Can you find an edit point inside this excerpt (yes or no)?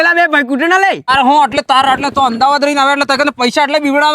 yes